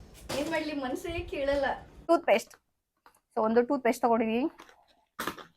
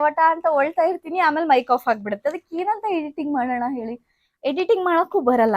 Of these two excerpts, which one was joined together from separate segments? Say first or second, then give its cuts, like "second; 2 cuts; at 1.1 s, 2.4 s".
first; 1 cut; at 1.9 s